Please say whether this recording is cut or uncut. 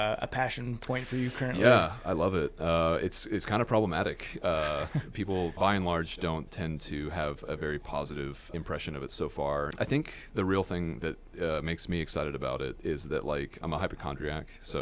cut